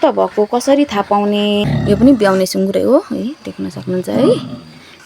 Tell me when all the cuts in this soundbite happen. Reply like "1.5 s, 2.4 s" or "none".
1.7 s